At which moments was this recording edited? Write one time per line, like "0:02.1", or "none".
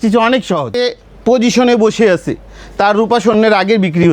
0:00.9